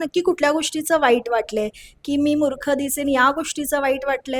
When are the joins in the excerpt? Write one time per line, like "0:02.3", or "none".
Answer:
none